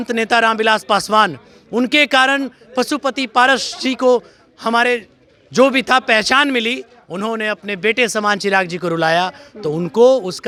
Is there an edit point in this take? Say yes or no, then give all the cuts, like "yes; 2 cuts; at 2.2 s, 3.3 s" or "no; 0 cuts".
no; 0 cuts